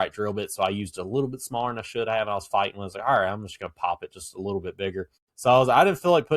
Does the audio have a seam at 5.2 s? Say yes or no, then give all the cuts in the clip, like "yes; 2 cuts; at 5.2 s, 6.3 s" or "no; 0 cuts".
yes; 1 cut; at 5.2 s